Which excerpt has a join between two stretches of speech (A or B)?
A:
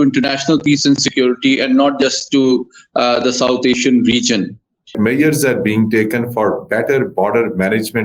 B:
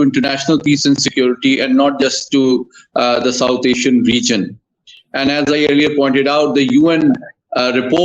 A